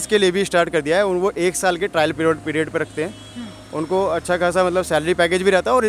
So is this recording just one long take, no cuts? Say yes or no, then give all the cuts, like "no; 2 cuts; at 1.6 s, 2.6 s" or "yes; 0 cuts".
yes; 0 cuts